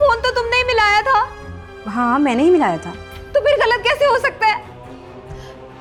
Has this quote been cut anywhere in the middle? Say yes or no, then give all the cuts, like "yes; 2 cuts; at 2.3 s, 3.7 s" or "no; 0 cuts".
no; 0 cuts